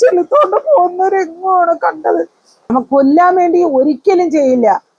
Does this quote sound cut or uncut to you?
cut